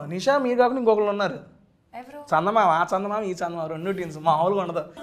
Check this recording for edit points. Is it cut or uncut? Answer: uncut